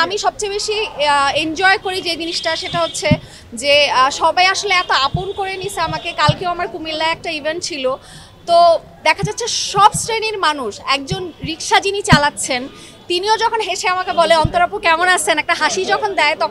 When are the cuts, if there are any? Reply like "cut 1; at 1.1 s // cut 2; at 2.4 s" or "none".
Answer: none